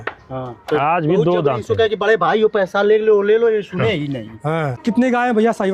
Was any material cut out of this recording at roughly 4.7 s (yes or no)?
yes